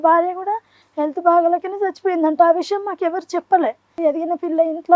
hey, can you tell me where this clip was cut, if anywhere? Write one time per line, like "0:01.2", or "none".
0:04.0